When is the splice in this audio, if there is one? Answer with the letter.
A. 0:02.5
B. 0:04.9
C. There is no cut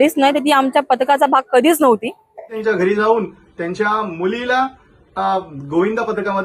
A